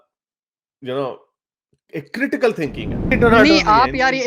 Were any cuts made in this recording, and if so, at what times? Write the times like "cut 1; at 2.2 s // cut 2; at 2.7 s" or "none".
cut 1; at 3.1 s